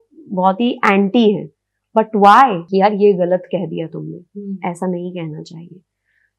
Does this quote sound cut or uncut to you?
cut